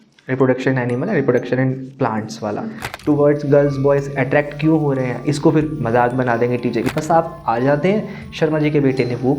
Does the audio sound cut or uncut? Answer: cut